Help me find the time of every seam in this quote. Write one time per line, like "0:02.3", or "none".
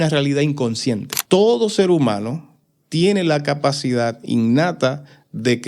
0:01.1